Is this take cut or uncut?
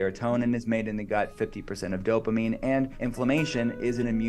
cut